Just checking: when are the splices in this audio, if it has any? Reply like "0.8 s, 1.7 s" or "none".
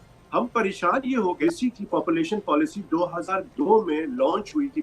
1.4 s